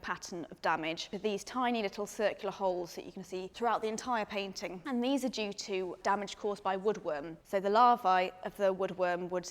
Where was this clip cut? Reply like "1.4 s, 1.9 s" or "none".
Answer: 1.0 s